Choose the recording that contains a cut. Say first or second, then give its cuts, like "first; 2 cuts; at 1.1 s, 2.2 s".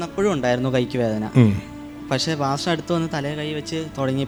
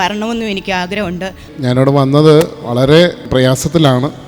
second; 1 cut; at 1.4 s